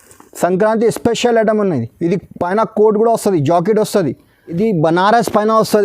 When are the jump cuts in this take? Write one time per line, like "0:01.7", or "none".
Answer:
0:04.4